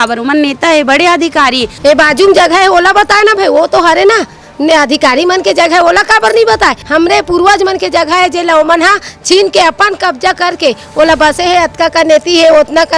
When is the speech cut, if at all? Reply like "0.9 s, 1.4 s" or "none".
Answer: 1.7 s, 6.8 s